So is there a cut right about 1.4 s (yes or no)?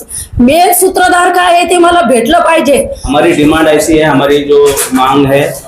no